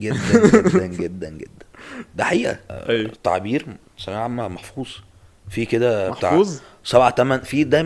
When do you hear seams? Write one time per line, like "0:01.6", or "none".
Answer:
0:03.1